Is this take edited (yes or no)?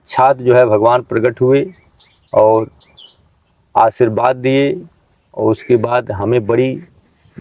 no